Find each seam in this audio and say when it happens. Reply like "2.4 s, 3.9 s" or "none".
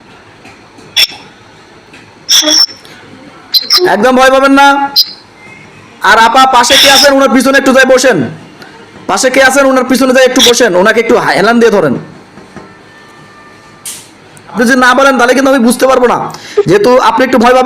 14.5 s